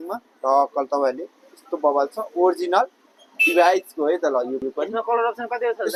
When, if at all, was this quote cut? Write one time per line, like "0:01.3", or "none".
none